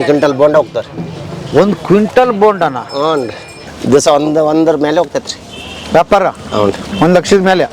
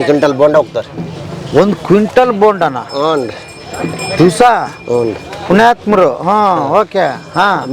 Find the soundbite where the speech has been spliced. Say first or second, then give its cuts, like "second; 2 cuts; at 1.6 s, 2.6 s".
first; 1 cut; at 3.7 s